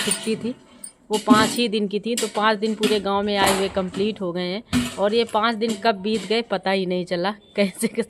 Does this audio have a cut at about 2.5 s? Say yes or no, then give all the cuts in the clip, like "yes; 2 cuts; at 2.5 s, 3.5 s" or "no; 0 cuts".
no; 0 cuts